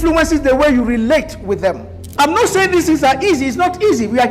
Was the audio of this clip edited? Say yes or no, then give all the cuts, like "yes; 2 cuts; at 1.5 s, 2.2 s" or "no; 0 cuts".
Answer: yes; 1 cut; at 2.0 s